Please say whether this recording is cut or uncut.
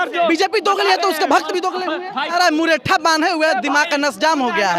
cut